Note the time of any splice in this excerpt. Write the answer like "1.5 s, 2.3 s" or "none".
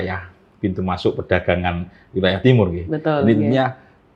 none